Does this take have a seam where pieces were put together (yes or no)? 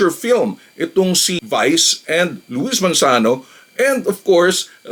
no